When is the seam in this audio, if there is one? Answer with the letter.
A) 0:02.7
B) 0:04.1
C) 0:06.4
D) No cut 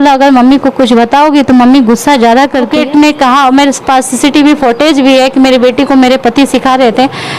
A